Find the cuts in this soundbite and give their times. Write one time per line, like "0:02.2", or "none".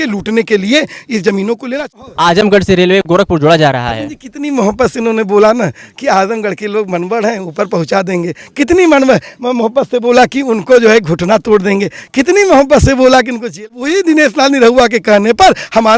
0:01.6
0:13.7